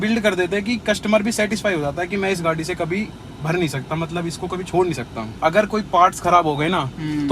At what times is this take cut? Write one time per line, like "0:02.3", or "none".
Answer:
0:05.2